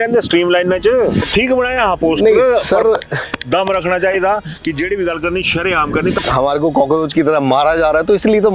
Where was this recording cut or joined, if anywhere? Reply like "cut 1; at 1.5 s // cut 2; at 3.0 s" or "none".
cut 1; at 1.3 s // cut 2; at 6.2 s